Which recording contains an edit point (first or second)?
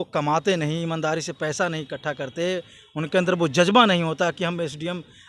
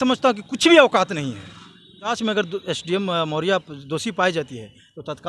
second